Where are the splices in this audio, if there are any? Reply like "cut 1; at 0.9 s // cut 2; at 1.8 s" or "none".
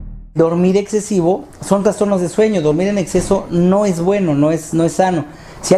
none